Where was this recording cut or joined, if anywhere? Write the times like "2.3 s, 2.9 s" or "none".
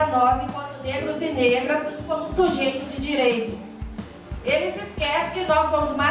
none